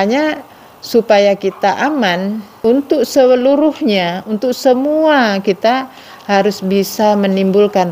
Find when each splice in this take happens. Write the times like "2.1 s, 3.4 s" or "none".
2.5 s